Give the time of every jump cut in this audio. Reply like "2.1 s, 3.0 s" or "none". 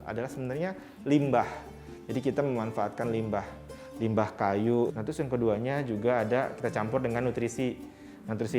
4.9 s